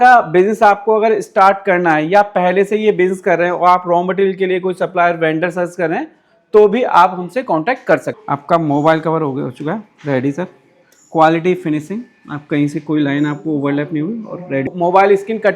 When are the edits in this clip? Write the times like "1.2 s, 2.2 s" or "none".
8.1 s, 14.7 s